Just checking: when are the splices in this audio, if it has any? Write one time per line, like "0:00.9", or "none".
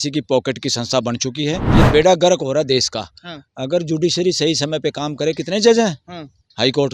0:01.7